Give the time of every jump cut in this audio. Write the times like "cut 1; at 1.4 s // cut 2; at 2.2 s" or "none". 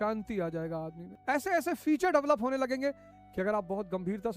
cut 1; at 1.1 s